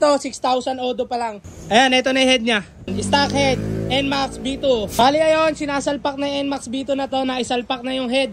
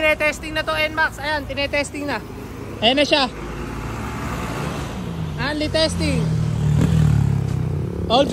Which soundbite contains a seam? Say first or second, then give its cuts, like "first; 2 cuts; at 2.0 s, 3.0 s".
first; 3 cuts; at 1.5 s, 2.9 s, 4.9 s